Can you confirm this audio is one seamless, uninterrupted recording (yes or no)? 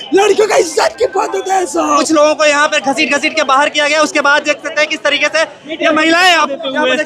no